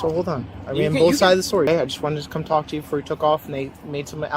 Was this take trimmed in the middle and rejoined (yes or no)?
yes